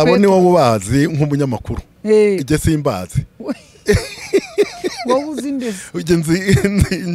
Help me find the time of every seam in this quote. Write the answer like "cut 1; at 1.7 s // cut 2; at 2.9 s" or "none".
none